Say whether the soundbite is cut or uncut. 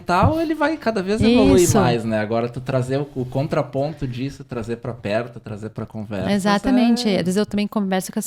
uncut